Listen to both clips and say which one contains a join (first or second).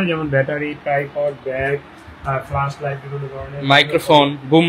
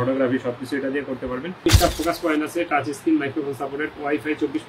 second